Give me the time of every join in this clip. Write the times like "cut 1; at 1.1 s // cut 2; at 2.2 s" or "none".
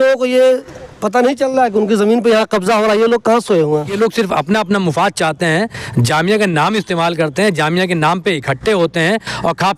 cut 1; at 3.9 s